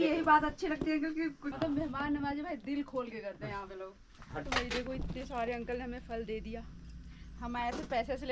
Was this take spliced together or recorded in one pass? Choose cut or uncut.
cut